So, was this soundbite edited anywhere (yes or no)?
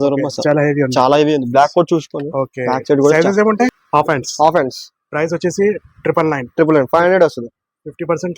yes